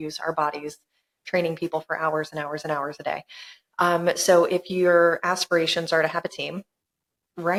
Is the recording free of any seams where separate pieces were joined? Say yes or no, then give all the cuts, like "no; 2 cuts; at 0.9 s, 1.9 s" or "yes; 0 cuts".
yes; 0 cuts